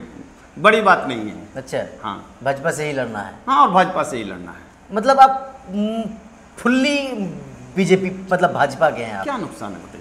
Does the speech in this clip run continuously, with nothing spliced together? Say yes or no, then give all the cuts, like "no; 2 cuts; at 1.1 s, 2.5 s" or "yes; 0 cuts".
yes; 0 cuts